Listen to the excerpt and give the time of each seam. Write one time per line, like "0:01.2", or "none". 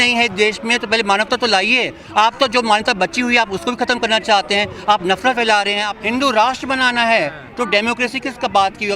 0:05.9

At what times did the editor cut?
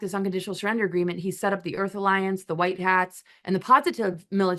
none

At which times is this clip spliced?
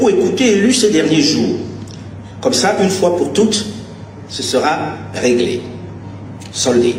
none

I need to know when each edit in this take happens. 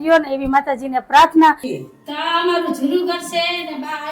0:01.7

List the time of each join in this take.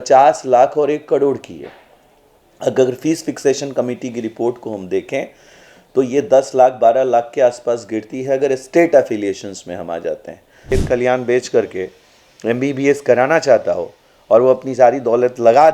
0:10.7

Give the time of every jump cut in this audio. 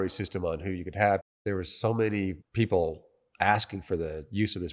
0:01.3
0:02.4

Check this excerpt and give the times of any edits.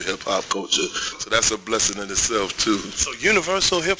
0:00.9

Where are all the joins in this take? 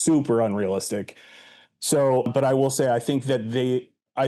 none

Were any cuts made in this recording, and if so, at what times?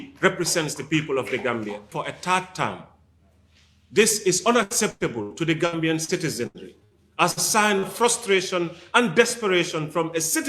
0:01.9

